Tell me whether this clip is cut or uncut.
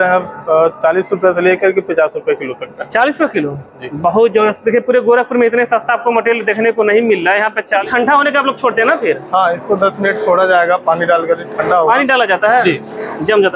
cut